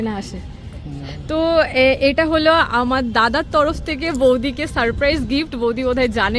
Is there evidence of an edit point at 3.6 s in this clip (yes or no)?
no